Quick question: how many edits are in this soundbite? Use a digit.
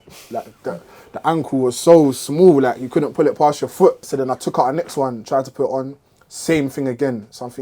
1